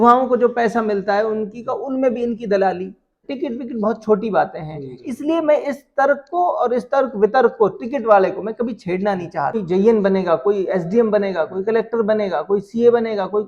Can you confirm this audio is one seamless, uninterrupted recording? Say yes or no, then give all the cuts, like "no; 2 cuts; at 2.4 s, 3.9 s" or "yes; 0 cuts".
no; 2 cuts; at 3.3 s, 9.6 s